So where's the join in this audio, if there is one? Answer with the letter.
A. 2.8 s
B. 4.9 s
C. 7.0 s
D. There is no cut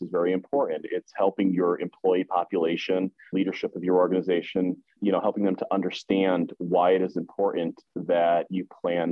D